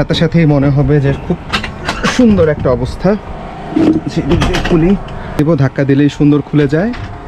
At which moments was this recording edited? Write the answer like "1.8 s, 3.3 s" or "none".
5.4 s